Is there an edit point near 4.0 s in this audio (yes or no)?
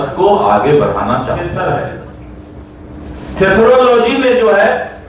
no